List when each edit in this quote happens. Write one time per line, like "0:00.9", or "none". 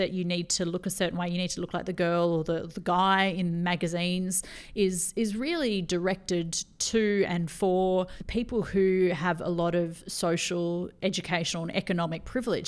0:08.2